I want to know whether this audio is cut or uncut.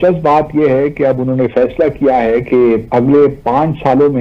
uncut